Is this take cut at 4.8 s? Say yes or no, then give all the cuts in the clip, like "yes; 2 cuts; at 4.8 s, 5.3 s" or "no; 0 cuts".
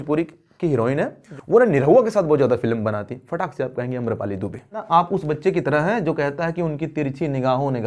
yes; 2 cuts; at 1.2 s, 4.8 s